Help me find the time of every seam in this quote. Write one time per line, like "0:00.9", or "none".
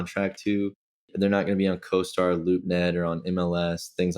0:01.1